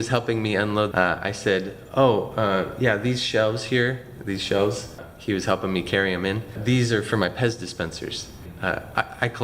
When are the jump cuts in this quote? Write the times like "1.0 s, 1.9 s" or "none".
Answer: 0.9 s, 5.1 s, 6.6 s